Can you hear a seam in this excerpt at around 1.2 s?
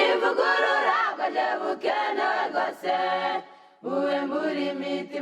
no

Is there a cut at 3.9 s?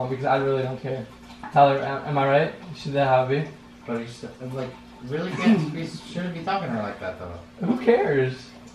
no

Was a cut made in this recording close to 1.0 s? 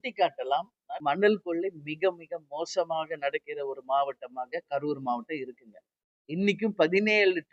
yes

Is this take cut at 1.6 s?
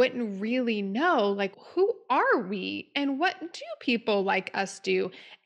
yes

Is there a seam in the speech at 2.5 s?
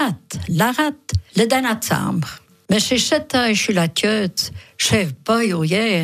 yes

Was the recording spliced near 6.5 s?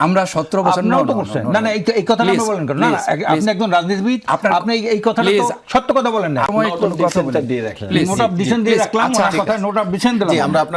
yes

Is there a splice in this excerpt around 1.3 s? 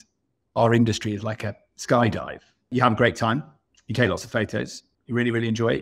no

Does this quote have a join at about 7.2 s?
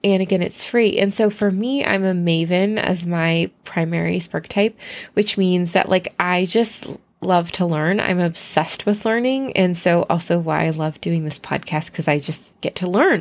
no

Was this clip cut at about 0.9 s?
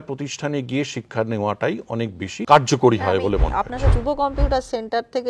no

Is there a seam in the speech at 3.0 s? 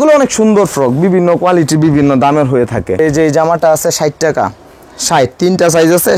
yes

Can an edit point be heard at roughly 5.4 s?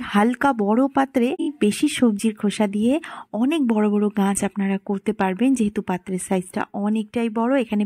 no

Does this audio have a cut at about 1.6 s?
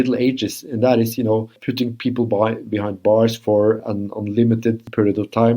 yes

